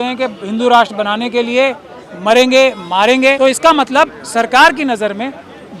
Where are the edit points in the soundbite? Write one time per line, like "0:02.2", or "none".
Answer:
0:03.4